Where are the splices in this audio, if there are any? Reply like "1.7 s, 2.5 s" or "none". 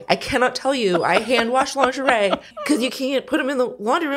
2.6 s

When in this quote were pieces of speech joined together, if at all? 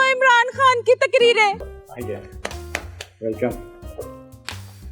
1.6 s

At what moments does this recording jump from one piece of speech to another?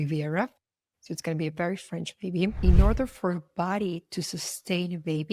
2.6 s

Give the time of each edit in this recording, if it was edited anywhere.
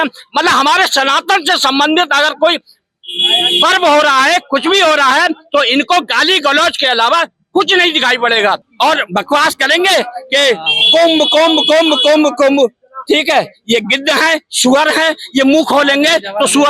8.7 s

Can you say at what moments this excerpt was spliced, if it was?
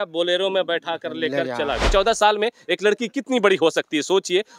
1.9 s

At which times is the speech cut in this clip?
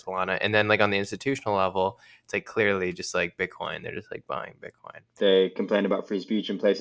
4.8 s

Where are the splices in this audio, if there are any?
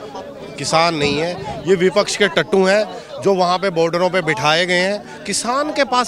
none

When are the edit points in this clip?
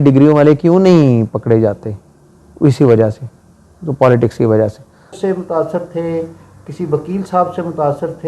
5.2 s

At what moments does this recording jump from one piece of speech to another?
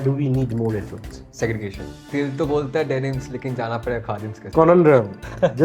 1.9 s, 4.4 s

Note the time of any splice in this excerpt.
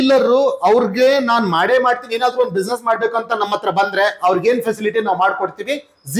none

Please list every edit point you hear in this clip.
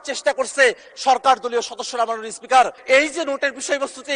2.8 s

